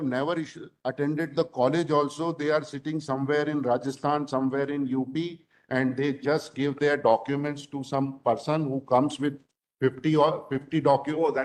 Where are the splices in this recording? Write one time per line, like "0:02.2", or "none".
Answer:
none